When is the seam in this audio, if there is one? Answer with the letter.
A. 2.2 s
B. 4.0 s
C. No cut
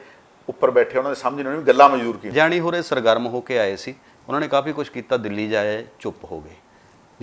A